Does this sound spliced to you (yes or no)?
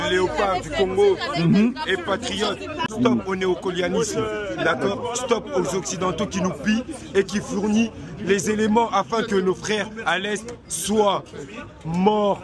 yes